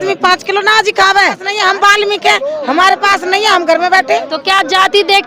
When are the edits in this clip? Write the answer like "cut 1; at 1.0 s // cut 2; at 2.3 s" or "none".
cut 1; at 1.5 s